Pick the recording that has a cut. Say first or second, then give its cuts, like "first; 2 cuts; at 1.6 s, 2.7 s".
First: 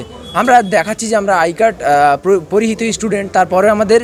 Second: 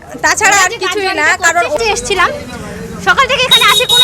second; 1 cut; at 1.8 s